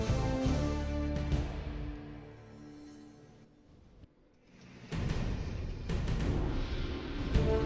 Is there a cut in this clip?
yes; 1 cut; at 3.4 s

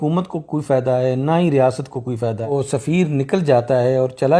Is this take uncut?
no; 1 cut; at 2.5 s

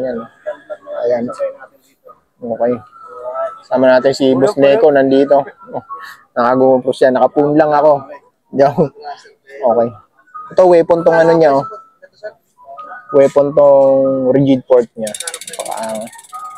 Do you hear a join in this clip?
no; 0 cuts

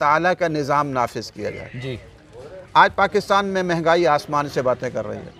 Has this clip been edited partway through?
no; 0 cuts

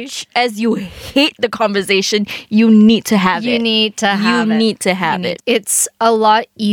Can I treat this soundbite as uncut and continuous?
no; 1 cut; at 5.3 s

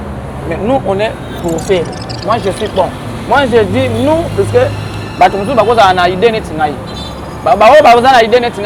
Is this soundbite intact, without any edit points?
yes; 0 cuts

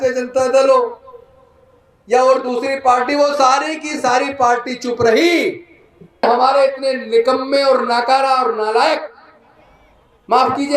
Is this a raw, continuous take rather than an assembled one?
no; 1 cut; at 6.2 s

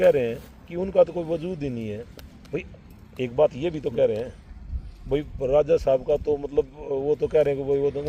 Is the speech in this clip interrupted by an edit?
no; 0 cuts

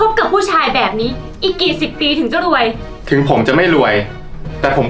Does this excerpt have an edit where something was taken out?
yes; 1 cut; at 2.9 s

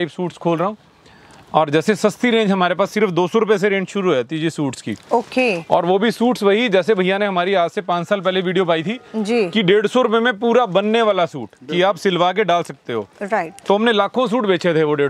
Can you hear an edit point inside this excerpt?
no; 0 cuts

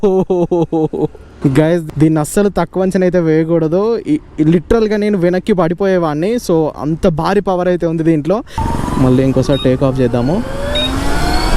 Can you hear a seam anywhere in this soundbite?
yes; 2 cuts; at 1.4 s, 8.6 s

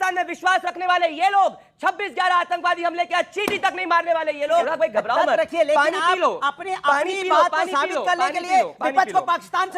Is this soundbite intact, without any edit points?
no; 1 cut; at 4.7 s

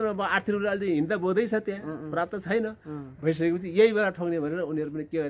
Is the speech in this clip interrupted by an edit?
no; 0 cuts

